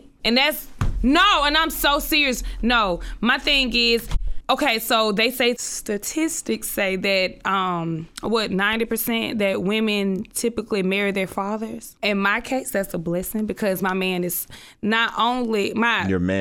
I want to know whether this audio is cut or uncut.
uncut